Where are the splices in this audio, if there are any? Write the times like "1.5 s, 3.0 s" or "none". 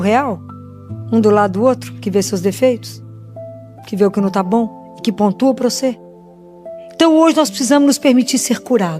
none